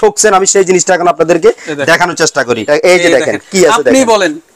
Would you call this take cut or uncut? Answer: cut